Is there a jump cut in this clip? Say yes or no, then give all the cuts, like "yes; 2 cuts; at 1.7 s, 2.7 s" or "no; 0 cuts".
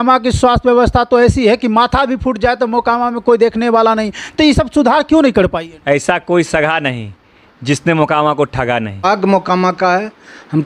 yes; 2 cuts; at 5.7 s, 9.1 s